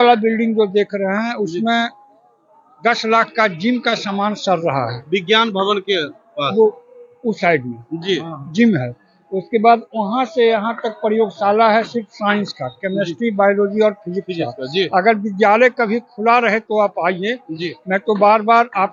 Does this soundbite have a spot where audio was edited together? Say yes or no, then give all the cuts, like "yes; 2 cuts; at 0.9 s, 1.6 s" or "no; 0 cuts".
no; 0 cuts